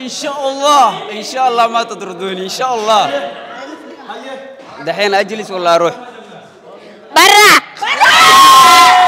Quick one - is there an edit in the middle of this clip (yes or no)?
no